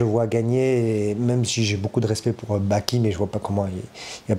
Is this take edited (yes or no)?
no